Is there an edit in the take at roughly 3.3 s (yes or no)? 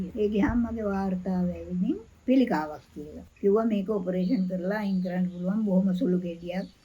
yes